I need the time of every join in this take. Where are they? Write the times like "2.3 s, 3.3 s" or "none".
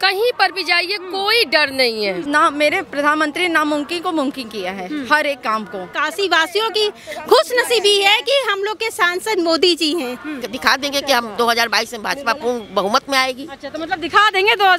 2.2 s, 5.9 s, 10.4 s